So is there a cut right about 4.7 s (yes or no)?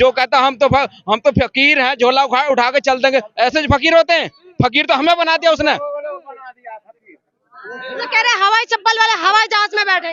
no